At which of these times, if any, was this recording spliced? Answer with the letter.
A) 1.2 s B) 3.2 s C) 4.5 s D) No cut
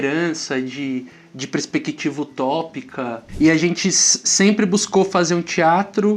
B